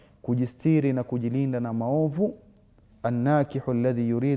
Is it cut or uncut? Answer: uncut